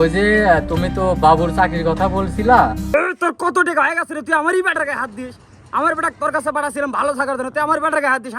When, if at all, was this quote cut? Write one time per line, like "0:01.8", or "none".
0:02.9